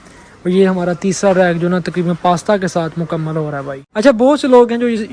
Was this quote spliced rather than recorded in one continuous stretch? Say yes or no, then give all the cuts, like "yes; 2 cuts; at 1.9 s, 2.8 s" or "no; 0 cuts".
yes; 1 cut; at 3.8 s